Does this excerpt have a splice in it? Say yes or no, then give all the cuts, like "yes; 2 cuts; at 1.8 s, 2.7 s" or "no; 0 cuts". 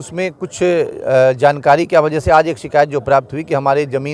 no; 0 cuts